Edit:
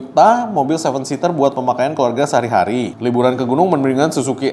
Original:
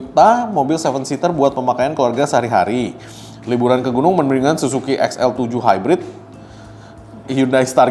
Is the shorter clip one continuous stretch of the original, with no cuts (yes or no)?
no